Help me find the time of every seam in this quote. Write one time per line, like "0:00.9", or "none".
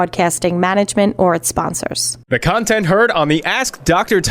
0:02.1

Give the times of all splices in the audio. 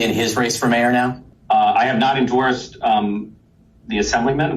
0:01.3

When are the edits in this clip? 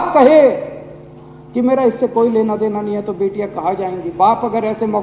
none

